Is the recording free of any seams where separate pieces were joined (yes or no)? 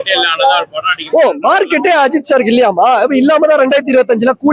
yes